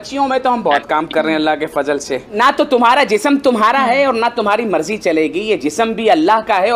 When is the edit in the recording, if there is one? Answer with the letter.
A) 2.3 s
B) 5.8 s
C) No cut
A